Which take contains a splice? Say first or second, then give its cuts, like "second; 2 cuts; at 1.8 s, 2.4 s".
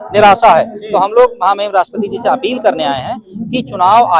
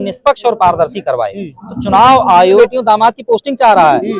second; 1 cut; at 2.6 s